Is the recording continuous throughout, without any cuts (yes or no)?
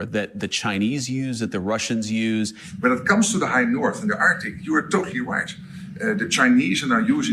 no